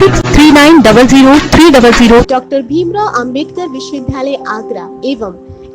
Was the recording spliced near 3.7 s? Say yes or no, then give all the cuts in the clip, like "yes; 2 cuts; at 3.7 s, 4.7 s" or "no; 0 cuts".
no; 1 cut; at 2.2 s